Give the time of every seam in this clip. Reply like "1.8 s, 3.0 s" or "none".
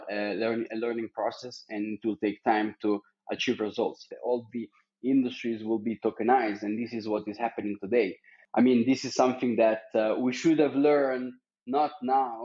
4.1 s, 8.3 s